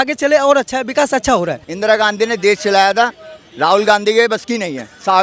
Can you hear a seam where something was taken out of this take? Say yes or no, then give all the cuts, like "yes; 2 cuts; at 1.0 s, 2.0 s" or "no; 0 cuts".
yes; 1 cut; at 1.6 s